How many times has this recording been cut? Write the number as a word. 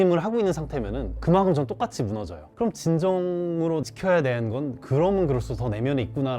zero